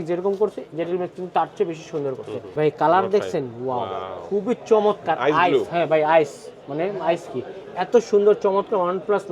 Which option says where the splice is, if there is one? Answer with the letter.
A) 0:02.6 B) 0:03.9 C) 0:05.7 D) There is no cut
A